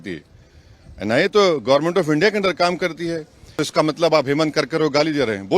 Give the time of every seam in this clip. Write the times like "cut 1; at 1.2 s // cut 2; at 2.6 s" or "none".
cut 1; at 3.5 s